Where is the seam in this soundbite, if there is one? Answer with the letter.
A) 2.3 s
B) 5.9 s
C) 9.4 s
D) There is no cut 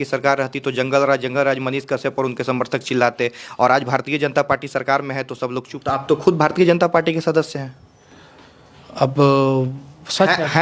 B